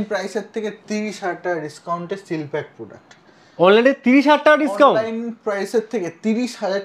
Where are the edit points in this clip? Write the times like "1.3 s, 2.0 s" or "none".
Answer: none